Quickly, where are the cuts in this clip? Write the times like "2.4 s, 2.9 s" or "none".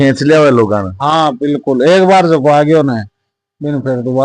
none